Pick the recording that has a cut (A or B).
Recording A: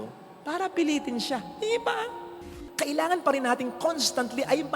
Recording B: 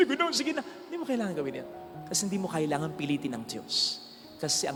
A